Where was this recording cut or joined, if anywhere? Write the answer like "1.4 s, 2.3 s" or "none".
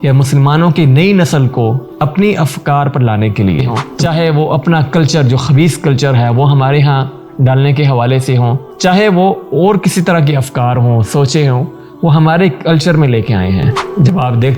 3.8 s